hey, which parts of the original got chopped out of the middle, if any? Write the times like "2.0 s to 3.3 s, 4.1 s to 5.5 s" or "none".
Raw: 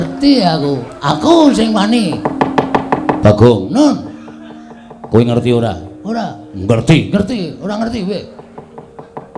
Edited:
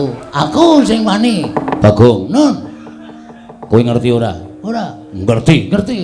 2.4 s to 3.1 s